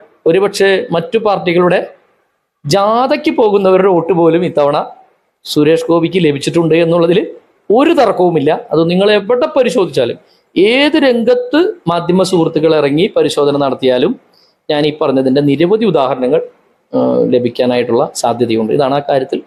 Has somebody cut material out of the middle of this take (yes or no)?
no